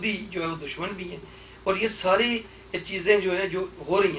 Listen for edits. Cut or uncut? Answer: uncut